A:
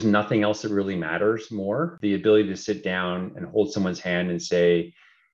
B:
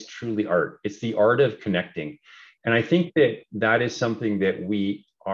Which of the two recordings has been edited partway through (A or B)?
A